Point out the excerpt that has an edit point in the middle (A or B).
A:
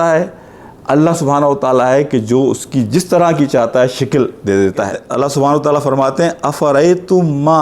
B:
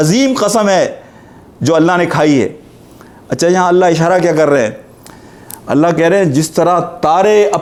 A